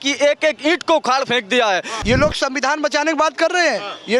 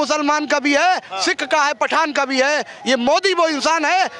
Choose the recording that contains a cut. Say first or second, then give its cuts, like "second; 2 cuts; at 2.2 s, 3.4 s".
first; 1 cut; at 1.9 s